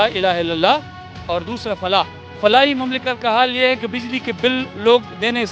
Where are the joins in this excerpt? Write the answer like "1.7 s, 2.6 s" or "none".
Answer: 2.2 s